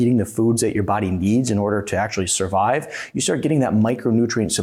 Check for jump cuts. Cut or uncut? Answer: uncut